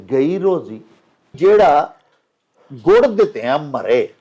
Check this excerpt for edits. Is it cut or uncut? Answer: cut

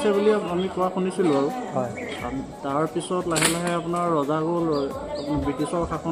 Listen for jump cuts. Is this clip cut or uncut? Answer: uncut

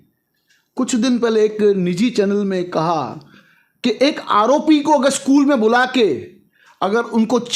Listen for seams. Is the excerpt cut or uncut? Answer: uncut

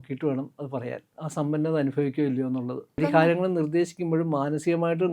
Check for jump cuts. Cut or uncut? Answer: cut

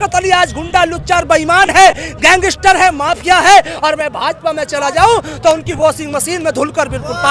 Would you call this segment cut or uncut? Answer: uncut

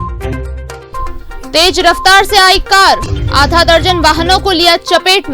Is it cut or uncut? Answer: cut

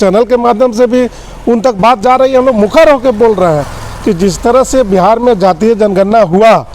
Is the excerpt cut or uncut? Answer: uncut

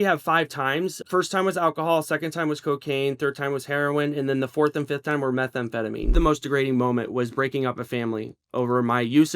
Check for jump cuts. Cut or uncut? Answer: cut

